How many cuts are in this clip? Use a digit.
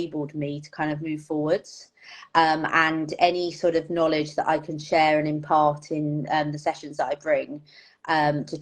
0